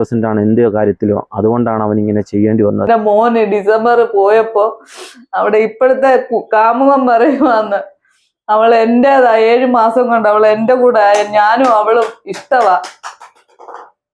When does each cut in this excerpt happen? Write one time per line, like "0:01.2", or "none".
0:02.9

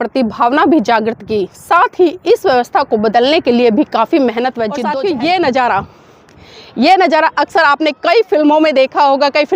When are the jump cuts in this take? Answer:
0:04.8

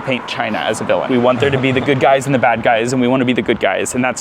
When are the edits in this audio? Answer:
0:01.1

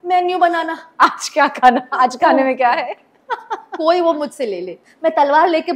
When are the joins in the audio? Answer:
0:03.1

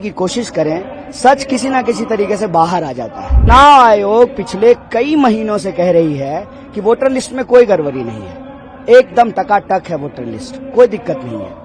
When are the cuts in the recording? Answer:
0:03.5

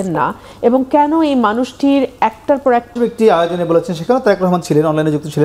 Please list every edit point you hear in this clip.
0:02.9

